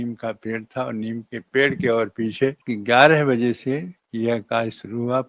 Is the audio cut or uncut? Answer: cut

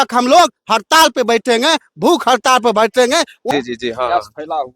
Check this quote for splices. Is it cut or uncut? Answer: cut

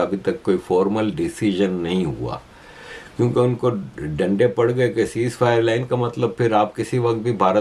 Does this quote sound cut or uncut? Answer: uncut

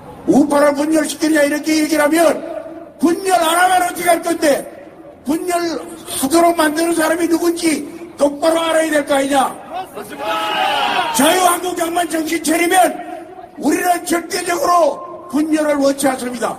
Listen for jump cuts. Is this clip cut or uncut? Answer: uncut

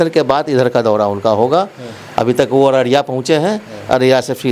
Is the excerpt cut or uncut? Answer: uncut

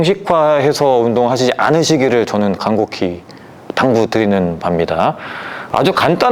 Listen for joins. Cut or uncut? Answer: uncut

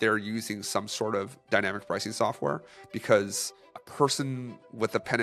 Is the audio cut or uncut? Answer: uncut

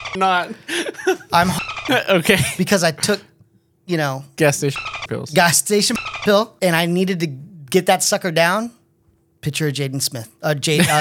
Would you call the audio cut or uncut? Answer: uncut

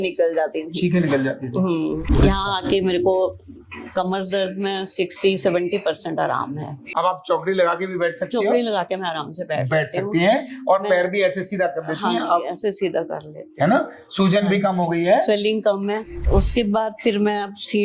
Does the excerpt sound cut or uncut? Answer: cut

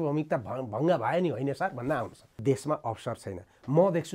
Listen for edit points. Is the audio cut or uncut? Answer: cut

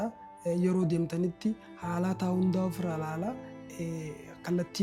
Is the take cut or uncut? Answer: uncut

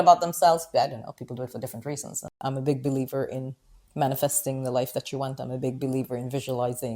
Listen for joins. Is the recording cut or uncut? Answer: cut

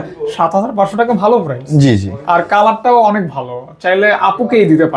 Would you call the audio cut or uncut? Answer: uncut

